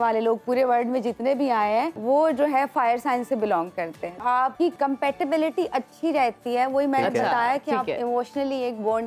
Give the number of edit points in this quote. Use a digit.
2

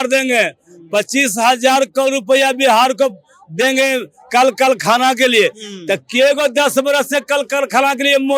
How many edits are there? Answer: 0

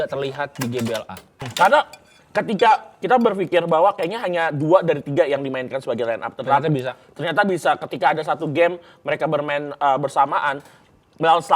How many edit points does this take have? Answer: 1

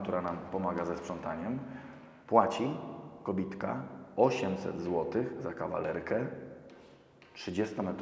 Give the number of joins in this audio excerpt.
0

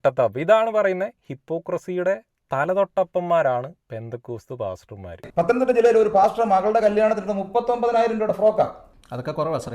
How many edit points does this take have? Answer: 1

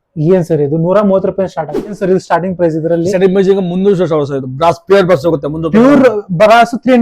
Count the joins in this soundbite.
1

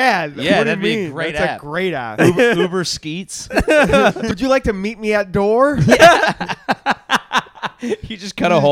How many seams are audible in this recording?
1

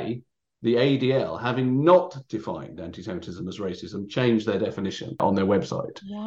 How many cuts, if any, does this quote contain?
1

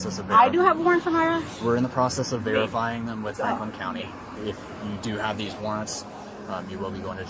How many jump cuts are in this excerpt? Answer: 0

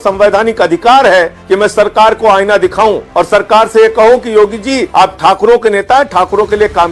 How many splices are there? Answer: 3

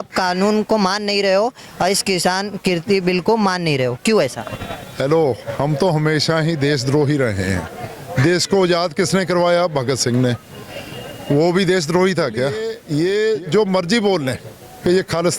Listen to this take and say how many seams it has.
1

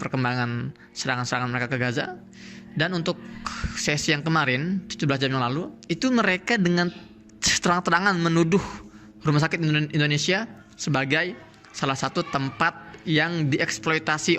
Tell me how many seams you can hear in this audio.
1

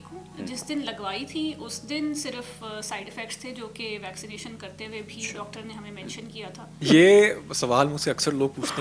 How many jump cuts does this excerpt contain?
1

